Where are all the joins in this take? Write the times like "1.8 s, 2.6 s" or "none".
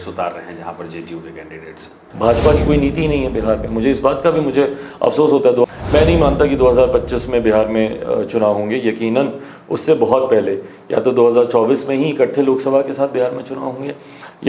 2.0 s, 5.7 s